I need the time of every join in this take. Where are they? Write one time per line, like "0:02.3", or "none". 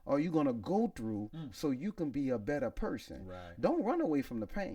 none